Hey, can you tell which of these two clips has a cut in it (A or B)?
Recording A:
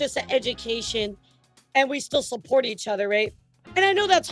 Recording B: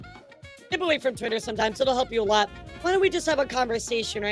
B